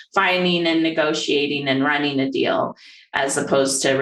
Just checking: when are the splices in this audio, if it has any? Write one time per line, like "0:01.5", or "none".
none

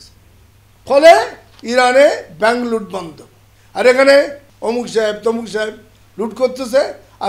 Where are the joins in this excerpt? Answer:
0:04.4

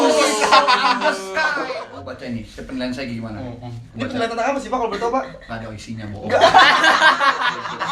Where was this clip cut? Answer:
0:01.9

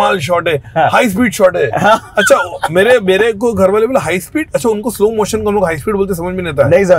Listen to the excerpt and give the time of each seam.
none

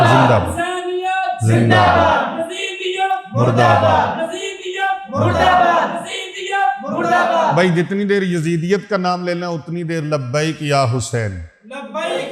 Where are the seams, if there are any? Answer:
none

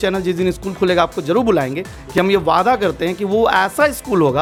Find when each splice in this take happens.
none

